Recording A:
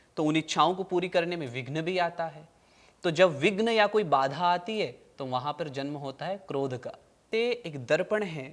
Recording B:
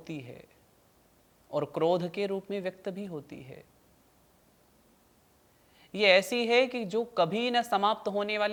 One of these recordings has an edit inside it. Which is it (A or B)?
A